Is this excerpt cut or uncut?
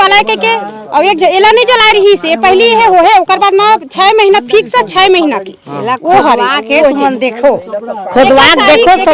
uncut